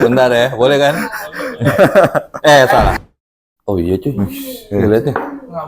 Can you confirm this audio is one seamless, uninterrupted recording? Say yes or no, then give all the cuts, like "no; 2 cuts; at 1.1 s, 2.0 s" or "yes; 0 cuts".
no; 1 cut; at 3.0 s